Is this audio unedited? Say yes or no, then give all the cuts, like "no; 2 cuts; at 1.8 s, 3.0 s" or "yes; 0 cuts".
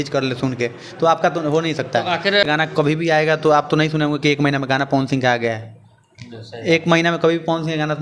no; 1 cut; at 2.5 s